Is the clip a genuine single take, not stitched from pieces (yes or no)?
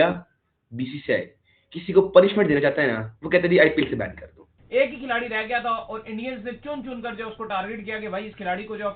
no